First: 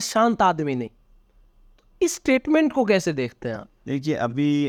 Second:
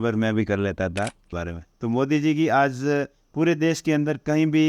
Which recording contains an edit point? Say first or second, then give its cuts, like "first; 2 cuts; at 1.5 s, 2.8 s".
second; 1 cut; at 1.2 s